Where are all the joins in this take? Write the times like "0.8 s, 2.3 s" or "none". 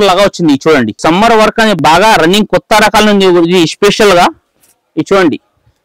0.9 s